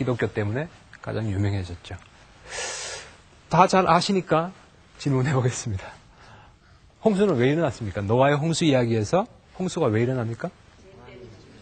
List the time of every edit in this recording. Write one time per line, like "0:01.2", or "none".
0:01.7